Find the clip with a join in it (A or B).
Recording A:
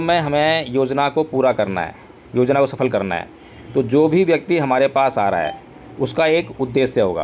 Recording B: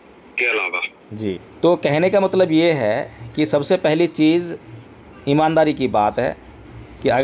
B